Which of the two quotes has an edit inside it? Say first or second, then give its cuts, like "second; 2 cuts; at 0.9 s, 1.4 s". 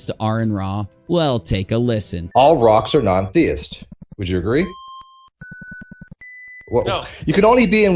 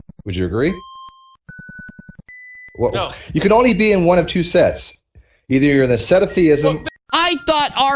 first; 2 cuts; at 1.0 s, 2.1 s